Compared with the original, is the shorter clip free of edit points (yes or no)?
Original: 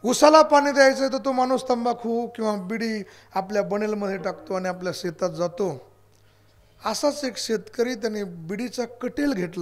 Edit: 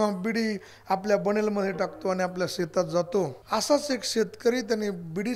no